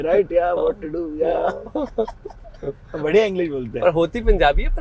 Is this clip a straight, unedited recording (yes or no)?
yes